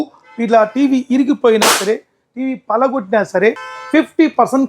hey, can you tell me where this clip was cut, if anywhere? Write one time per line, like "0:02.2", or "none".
0:03.7